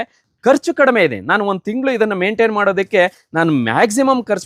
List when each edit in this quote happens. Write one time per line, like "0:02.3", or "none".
none